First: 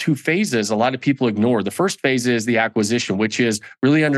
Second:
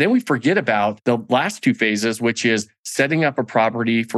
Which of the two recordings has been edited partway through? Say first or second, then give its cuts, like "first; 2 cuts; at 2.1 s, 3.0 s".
second; 1 cut; at 1.0 s